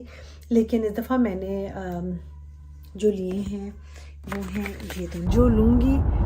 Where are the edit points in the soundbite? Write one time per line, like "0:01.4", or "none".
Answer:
0:05.2